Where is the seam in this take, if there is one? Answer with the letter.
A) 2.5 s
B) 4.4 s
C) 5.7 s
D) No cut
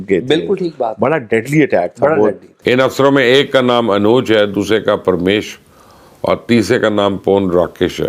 A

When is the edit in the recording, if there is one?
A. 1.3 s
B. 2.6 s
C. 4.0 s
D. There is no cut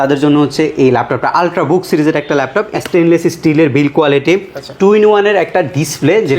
B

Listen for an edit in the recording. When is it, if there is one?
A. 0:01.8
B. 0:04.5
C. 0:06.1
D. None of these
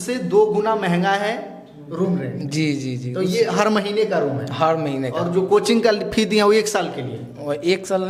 D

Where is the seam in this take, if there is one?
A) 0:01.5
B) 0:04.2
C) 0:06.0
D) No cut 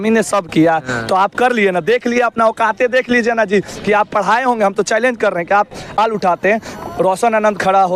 C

